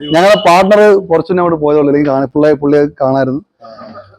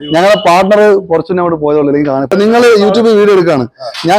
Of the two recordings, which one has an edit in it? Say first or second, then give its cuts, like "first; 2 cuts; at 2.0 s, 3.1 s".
second; 1 cut; at 2.3 s